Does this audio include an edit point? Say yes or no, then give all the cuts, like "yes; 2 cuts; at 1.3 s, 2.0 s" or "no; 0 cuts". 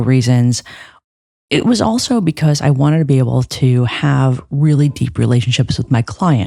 no; 0 cuts